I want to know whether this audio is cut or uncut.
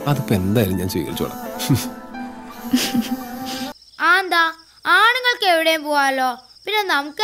cut